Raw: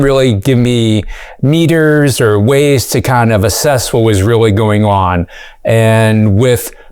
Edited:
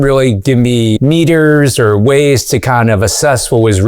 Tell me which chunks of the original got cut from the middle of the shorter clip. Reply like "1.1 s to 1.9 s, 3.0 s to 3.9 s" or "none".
1.0 s to 1.4 s